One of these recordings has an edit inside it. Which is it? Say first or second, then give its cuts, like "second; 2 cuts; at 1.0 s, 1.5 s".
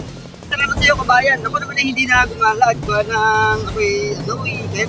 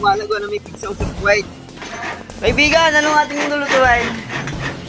second; 1 cut; at 1.9 s